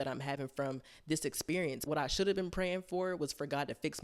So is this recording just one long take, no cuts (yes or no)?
no